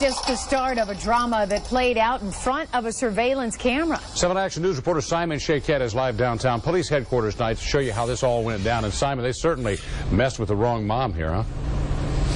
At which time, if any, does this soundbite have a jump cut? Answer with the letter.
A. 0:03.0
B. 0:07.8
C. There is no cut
B